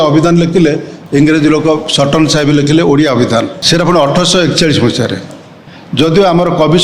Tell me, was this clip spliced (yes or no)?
yes